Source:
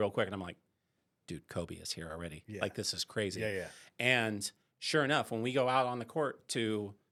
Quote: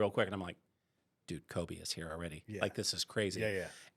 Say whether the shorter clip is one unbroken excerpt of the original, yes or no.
yes